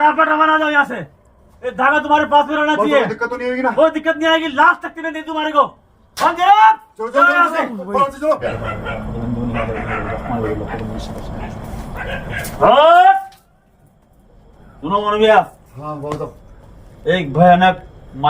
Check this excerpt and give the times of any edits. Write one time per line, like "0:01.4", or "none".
0:08.5